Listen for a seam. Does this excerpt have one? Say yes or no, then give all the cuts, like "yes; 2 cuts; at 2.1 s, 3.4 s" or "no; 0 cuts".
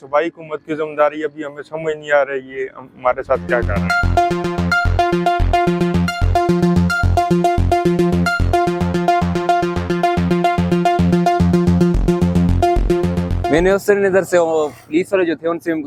no; 0 cuts